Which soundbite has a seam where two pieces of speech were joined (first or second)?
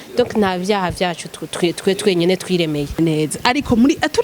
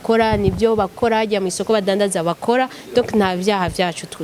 first